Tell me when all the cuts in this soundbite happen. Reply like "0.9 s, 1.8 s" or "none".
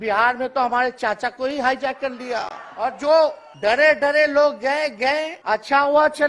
2.6 s, 3.5 s, 5.3 s